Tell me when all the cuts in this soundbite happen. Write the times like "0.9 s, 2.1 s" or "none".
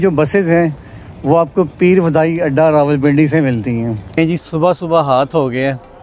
4.1 s